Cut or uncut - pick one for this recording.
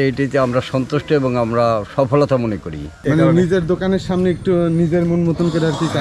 cut